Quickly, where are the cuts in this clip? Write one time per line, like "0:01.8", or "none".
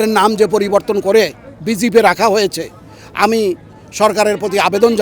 none